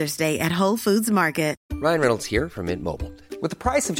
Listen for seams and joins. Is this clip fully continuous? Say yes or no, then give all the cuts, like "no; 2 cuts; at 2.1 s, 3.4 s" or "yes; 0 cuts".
no; 1 cut; at 1.6 s